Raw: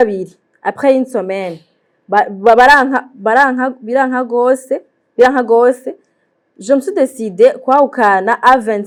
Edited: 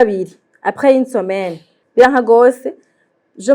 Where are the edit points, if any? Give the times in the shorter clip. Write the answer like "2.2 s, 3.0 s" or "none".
1.8 s